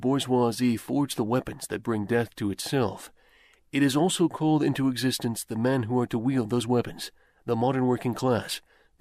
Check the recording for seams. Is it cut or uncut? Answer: cut